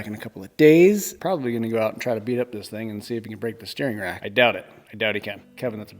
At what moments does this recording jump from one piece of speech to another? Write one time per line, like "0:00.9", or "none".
0:01.1
0:04.2